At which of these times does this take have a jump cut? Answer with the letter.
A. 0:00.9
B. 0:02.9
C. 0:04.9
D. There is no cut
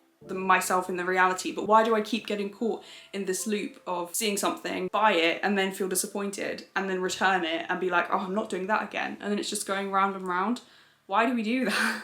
C